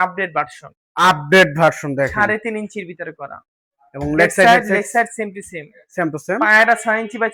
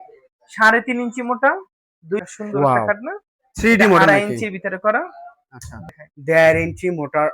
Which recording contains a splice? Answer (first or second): second